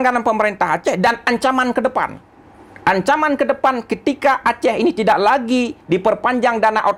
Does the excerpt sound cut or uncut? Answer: uncut